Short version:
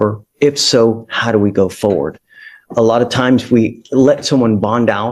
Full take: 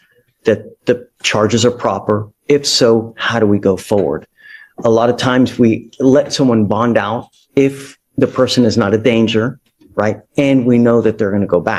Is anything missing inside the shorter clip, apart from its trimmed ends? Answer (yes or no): no